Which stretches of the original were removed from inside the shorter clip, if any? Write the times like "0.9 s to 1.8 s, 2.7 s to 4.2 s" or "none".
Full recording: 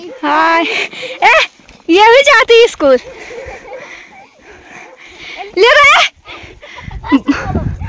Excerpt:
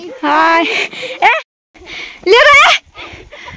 1.3 s to 4.6 s